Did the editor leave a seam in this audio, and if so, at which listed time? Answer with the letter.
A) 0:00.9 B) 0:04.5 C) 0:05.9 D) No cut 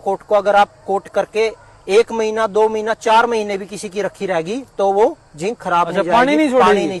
D